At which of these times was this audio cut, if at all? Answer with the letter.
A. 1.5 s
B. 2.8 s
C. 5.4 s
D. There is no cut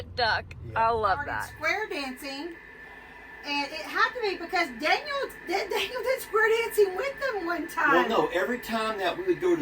A